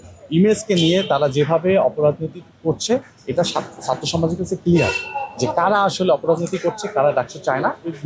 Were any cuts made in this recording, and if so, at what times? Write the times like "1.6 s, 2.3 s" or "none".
none